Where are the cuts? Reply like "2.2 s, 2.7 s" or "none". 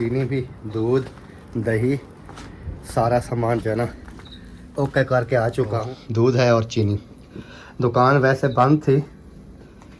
5.9 s